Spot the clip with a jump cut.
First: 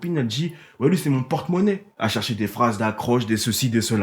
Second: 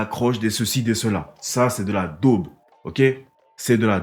first; 1 cut; at 1.9 s

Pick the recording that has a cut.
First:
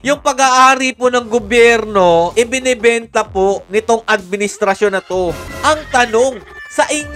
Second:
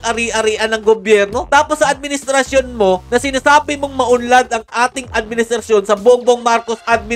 first; 1 cut; at 5.5 s

